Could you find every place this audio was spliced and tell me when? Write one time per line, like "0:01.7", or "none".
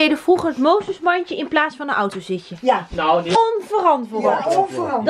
0:03.4

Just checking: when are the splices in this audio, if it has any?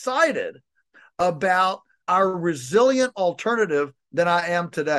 0:02.0

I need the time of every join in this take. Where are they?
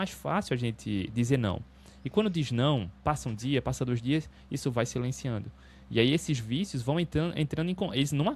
none

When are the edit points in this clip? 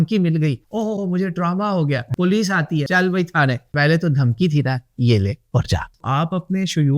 0:02.1
0:02.9
0:03.7
0:05.9

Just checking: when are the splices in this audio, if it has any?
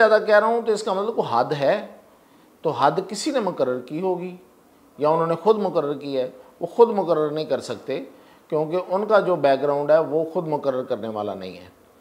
none

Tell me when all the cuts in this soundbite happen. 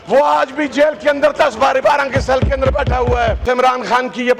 0:03.4

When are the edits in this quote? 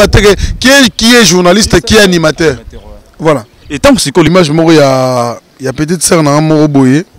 0:04.3

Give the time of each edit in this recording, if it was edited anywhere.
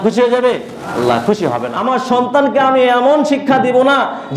0:01.7

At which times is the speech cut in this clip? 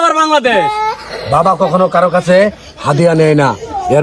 0:01.1

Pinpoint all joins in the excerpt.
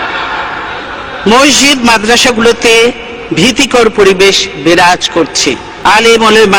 0:05.7

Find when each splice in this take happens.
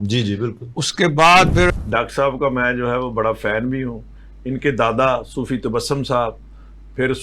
0:01.7

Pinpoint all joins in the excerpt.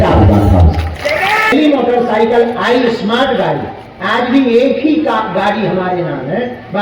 0:01.5

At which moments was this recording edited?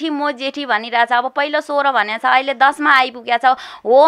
none

